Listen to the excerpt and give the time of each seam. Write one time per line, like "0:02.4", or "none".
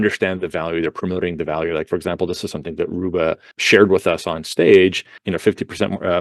0:03.5
0:05.2